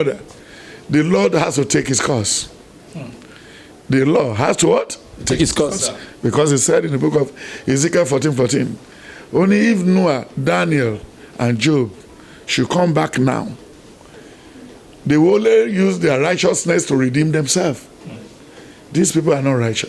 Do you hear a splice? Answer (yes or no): no